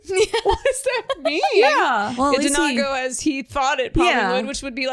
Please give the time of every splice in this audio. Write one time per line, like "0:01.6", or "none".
0:02.1